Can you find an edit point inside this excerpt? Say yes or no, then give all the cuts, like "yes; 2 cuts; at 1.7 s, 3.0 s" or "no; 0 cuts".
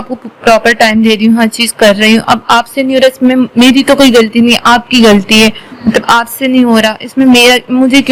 no; 0 cuts